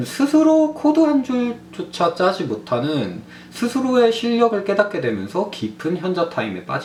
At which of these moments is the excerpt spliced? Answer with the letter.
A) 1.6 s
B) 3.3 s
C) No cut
C